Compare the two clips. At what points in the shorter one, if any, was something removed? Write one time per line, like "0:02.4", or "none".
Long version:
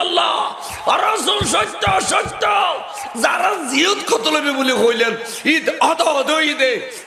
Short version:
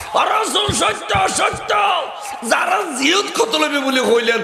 none